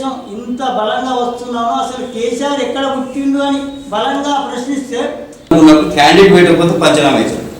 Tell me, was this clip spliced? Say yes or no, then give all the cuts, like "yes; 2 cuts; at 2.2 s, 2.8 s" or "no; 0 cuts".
yes; 1 cut; at 5.5 s